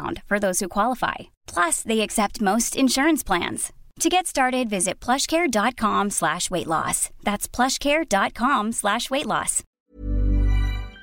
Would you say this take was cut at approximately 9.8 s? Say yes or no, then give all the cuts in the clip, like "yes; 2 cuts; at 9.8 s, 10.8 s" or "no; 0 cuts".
yes; 1 cut; at 9.8 s